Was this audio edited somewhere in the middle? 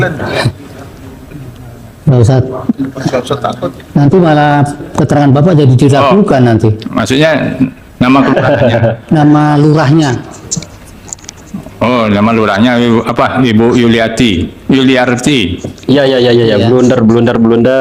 no; 0 cuts

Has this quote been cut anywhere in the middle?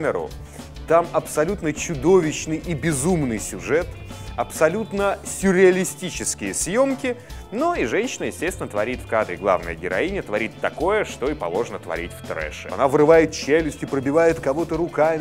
no; 0 cuts

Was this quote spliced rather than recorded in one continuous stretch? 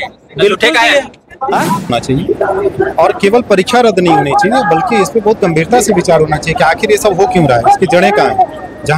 yes; 1 cut; at 1.9 s

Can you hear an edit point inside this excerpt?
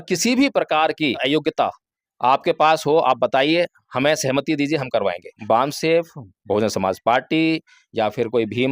yes; 2 cuts; at 1.2 s, 5.3 s

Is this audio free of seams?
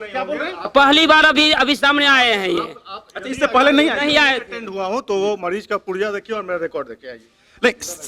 yes; 0 cuts

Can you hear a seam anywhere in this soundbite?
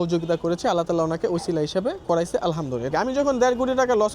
yes; 1 cut; at 2.9 s

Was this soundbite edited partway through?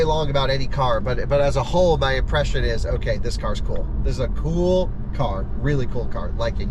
no; 0 cuts

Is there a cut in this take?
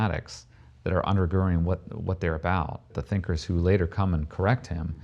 yes; 1 cut; at 2.8 s

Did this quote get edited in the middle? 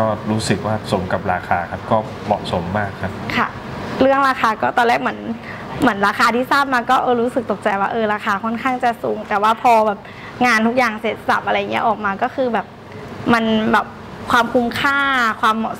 no; 0 cuts

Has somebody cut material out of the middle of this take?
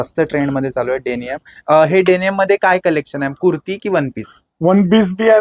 no; 0 cuts

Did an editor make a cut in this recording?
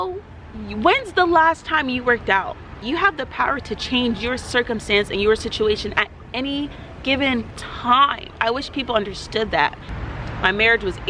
yes; 2 cuts; at 2.8 s, 9.8 s

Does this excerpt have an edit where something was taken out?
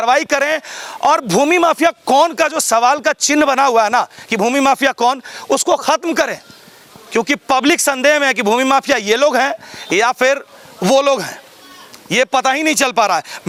no; 0 cuts

